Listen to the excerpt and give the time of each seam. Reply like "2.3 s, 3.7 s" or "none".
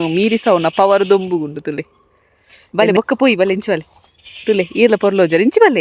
2.8 s